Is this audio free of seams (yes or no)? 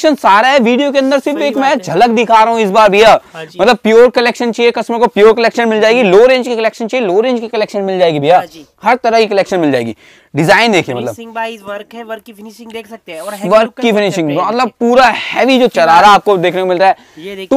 no